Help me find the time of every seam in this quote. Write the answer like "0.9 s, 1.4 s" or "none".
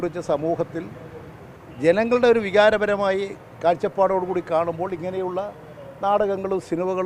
none